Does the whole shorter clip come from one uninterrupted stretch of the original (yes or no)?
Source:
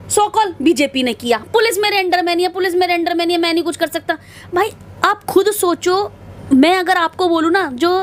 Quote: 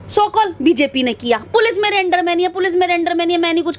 yes